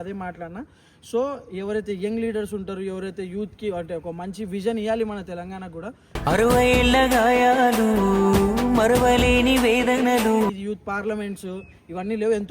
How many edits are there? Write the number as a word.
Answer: one